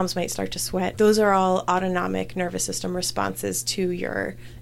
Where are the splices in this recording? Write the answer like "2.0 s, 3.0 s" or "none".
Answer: 0.9 s